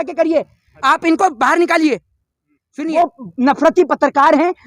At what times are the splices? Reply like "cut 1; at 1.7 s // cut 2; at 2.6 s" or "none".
cut 1; at 2.8 s